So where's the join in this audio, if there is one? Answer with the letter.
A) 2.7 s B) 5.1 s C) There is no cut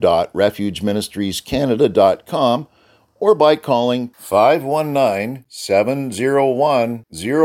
C